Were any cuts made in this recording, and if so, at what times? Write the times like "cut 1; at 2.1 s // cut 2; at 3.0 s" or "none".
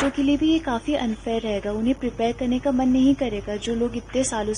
none

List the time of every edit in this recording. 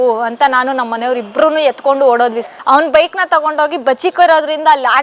cut 1; at 2.5 s

